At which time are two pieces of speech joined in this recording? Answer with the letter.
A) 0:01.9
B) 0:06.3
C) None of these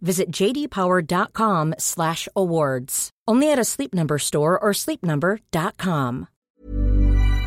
B